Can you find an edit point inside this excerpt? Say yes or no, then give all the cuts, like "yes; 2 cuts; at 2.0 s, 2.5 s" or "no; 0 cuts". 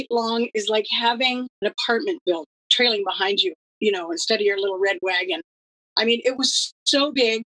yes; 2 cuts; at 1.5 s, 2.6 s